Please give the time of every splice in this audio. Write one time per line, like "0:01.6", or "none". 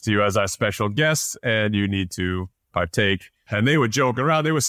0:03.4